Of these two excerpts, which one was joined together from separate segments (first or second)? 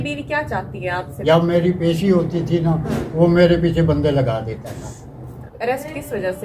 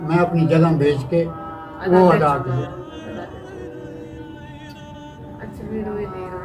first